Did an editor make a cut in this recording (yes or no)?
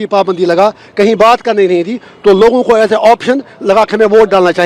no